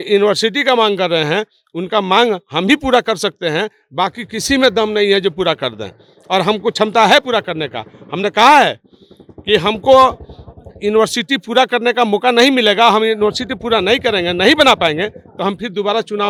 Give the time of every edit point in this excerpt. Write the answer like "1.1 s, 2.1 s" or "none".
none